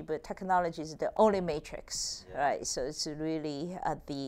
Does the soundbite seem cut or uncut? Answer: cut